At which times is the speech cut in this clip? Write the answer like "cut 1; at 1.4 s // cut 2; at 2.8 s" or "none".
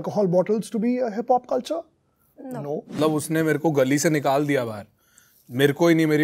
cut 1; at 3.0 s